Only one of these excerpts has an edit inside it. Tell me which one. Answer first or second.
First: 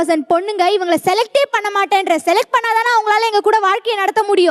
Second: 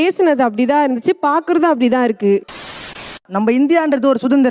second